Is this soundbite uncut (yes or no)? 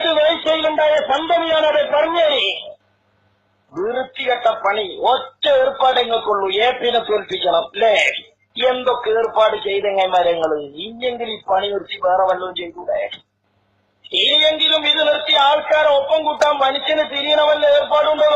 no